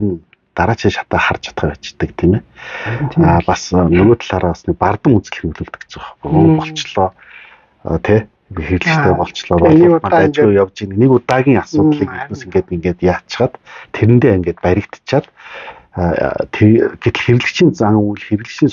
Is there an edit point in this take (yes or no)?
no